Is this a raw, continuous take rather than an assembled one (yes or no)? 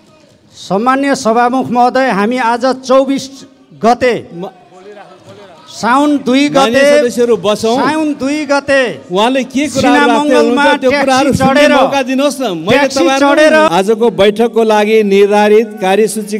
no